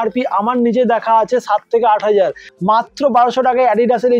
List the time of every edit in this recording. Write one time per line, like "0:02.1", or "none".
0:02.5